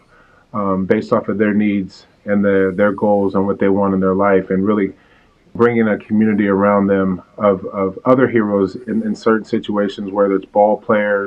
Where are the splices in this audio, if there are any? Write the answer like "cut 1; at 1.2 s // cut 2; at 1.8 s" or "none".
none